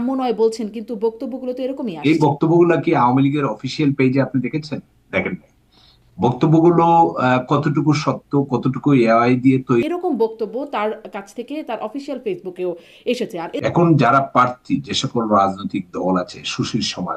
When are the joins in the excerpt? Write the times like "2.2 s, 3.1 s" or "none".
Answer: 2.0 s, 9.8 s, 13.6 s